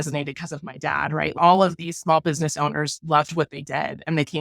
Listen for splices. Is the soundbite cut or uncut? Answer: cut